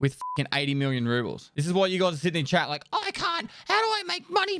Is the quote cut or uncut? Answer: uncut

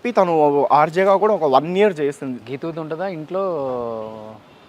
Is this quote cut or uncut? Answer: cut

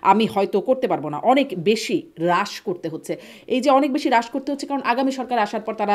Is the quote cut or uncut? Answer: uncut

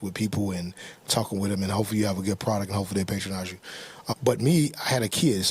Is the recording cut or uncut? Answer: cut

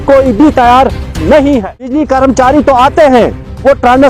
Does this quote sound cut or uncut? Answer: cut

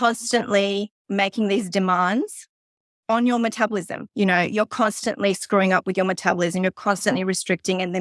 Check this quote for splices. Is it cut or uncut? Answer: cut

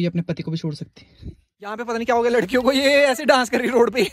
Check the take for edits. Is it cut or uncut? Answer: cut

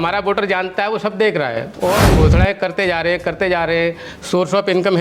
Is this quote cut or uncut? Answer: cut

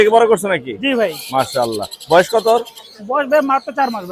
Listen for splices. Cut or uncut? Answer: uncut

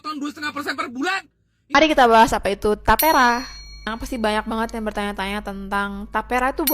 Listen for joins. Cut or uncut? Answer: cut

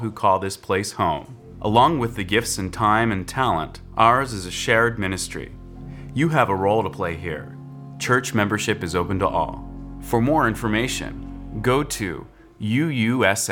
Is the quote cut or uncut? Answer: uncut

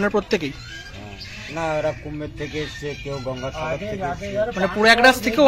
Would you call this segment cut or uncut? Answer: uncut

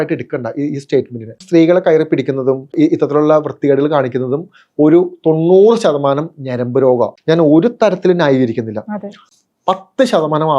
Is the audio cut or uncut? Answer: cut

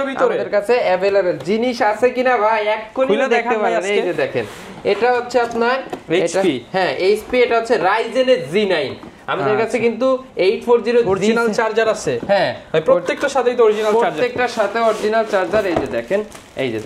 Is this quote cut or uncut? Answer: uncut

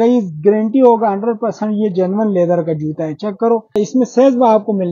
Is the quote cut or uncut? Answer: cut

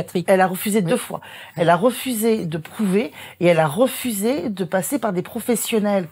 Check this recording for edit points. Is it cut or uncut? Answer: uncut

